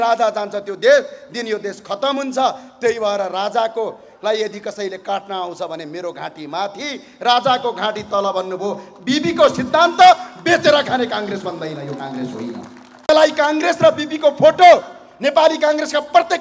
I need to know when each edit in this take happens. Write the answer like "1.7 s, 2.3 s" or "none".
none